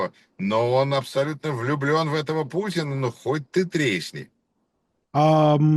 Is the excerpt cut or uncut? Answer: uncut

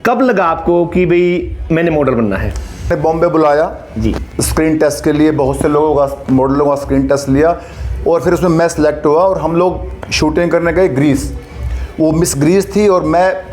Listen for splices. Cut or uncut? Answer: cut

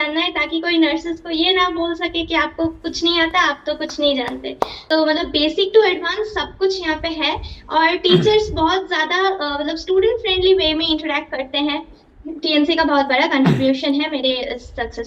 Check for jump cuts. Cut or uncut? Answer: cut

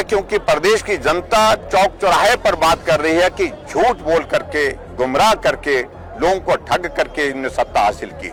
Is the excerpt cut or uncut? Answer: uncut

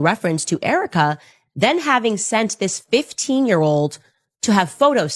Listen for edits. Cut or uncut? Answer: uncut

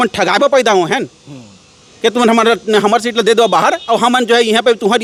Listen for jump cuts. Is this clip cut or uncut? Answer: uncut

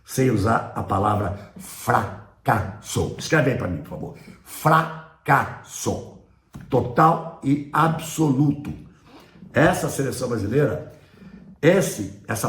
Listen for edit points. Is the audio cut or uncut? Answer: uncut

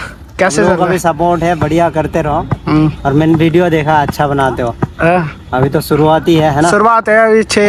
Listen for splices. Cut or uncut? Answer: uncut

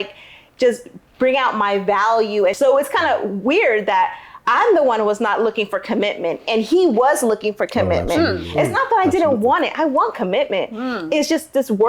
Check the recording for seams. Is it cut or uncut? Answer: cut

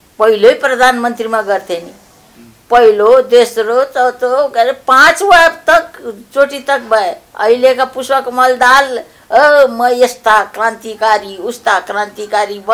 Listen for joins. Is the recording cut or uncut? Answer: uncut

